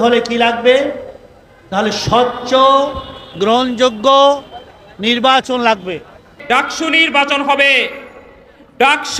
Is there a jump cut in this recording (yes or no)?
yes